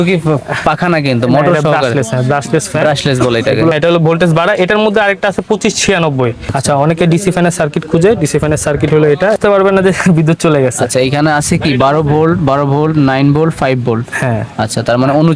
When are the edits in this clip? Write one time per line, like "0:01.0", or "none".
0:03.7
0:06.5
0:09.4

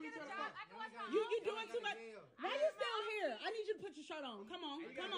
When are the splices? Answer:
0:02.1

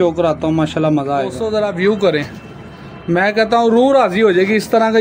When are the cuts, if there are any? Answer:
0:01.4

